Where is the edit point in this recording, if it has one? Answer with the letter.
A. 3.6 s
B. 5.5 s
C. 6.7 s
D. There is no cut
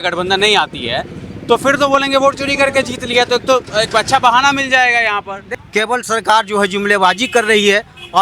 B